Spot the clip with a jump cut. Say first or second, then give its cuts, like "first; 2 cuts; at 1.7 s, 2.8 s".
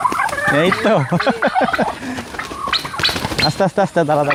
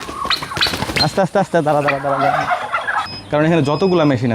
second; 1 cut; at 3.1 s